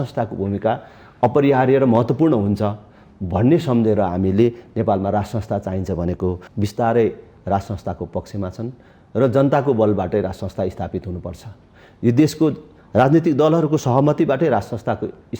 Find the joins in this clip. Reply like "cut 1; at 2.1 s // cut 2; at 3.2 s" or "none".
cut 1; at 6.5 s

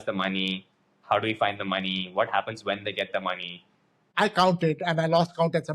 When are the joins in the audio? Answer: cut 1; at 4.1 s

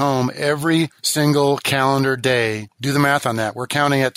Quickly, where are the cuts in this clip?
cut 1; at 1.0 s // cut 2; at 2.7 s

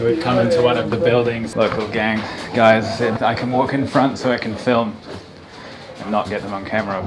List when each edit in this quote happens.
cut 1; at 1.5 s // cut 2; at 3.1 s

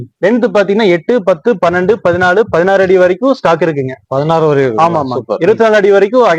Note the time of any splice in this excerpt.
none

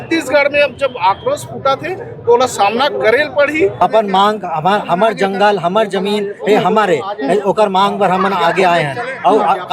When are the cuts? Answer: cut 1; at 3.8 s

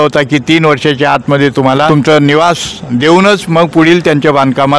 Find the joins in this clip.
cut 1; at 1.9 s

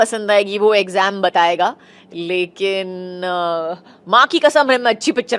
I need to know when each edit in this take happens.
none

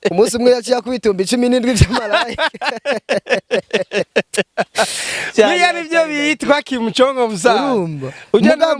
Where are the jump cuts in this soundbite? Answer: none

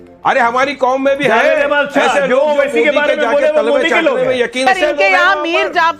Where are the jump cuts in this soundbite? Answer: cut 1; at 4.6 s

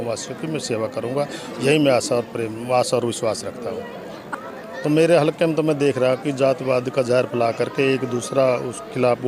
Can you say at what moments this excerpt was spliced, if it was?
cut 1; at 4.3 s

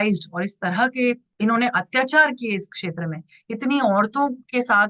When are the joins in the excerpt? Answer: cut 1; at 1.3 s

